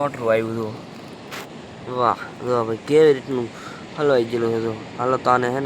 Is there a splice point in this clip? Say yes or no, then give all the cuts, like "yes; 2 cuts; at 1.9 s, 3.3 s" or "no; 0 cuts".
no; 0 cuts